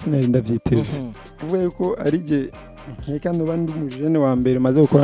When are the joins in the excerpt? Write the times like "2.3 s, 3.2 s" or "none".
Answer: 1.4 s